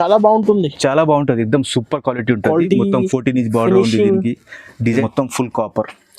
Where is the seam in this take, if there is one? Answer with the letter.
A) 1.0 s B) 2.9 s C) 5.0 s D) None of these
C